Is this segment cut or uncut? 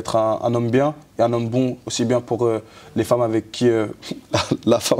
uncut